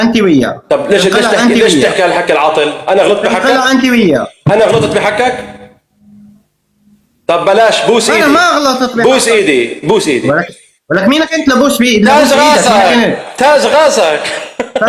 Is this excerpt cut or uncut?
uncut